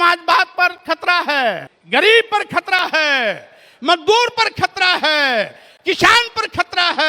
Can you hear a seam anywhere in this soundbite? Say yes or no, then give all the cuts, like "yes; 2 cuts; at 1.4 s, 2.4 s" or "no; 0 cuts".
yes; 1 cut; at 1.7 s